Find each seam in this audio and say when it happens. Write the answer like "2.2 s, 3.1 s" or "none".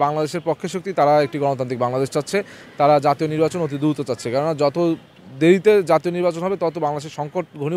none